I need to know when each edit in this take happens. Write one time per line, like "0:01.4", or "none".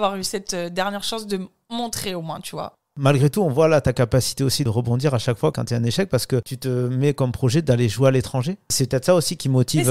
none